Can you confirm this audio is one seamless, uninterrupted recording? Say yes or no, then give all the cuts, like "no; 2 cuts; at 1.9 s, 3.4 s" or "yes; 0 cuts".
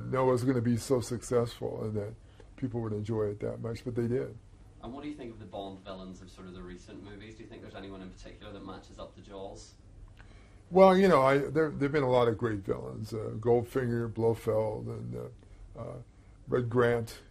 no; 1 cut; at 15.9 s